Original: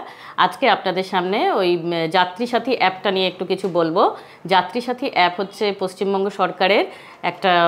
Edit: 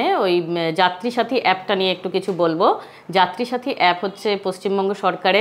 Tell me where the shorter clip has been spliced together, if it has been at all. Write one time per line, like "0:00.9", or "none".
none